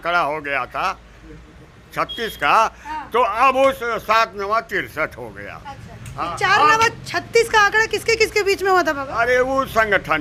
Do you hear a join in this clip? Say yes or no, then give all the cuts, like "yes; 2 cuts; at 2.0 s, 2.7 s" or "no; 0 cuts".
no; 0 cuts